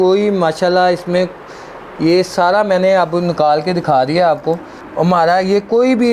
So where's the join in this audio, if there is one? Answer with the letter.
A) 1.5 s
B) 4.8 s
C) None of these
B